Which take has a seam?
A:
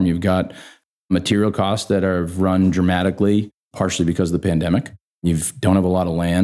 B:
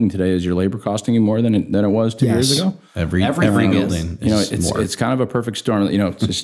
A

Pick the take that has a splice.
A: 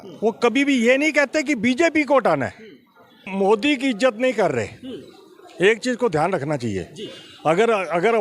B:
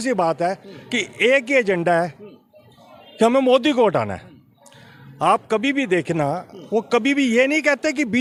A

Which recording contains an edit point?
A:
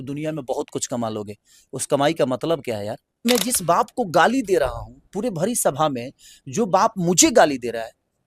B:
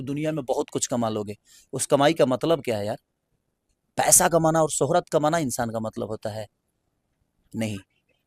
A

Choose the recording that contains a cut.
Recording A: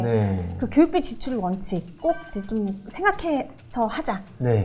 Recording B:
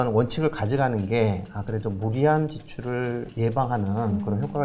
B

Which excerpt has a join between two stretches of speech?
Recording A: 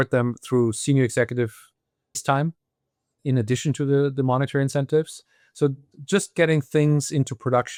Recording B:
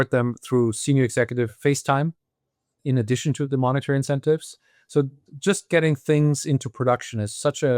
B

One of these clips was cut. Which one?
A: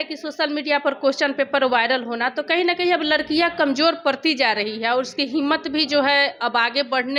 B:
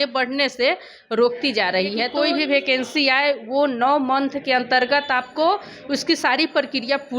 B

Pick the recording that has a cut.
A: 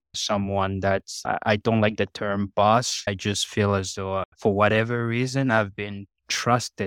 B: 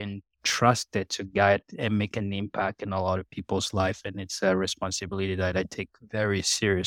A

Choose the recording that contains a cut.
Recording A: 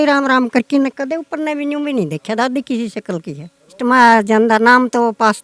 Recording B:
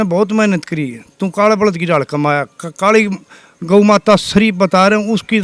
A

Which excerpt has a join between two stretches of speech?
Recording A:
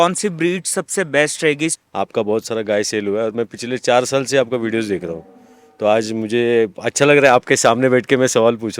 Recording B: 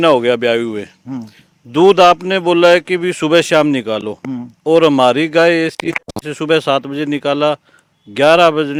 A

